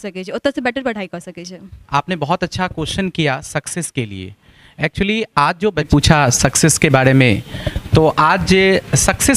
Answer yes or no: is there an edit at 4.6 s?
no